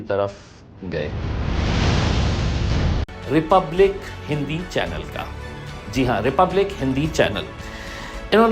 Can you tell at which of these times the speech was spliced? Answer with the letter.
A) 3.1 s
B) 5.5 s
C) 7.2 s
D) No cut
A